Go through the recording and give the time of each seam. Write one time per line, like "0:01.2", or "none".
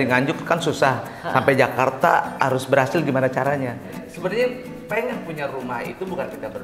0:03.9

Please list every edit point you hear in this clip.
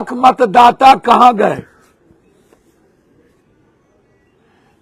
none

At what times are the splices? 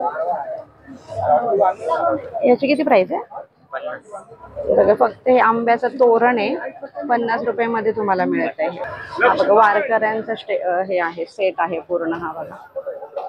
0:08.9

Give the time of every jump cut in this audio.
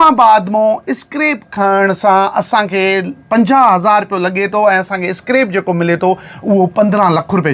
none

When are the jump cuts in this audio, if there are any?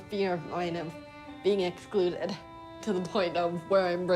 0:02.7

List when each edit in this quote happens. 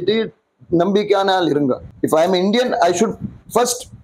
0:01.9

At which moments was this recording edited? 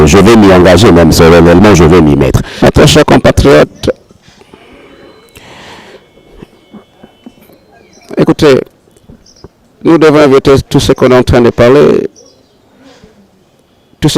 0:02.4

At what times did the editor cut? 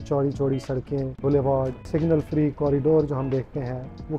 none

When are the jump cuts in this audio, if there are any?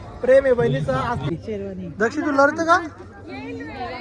0:01.3

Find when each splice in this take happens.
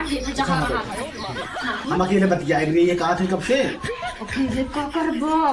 0:01.8

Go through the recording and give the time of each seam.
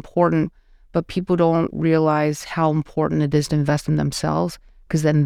none

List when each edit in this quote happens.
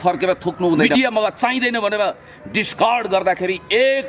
0:00.9

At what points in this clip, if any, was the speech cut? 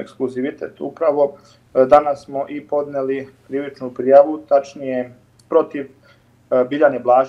none

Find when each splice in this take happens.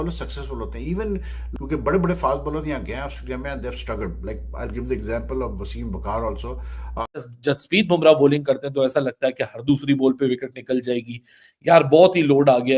0:01.4
0:07.2

